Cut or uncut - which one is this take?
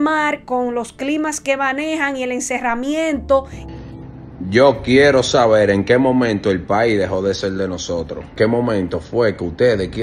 cut